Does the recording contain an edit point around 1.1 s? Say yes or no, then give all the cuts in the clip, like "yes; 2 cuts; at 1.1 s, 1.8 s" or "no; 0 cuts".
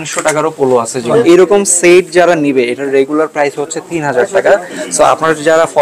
yes; 1 cut; at 1.1 s